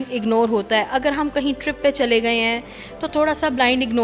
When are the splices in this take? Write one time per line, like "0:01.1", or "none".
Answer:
none